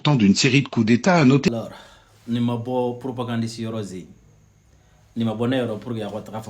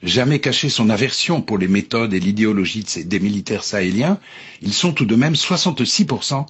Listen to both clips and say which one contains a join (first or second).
first